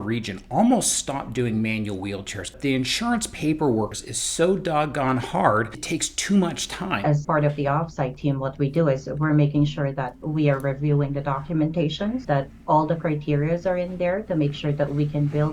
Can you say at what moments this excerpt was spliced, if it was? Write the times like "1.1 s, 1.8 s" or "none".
2.5 s, 4.0 s, 5.8 s, 7.1 s, 12.2 s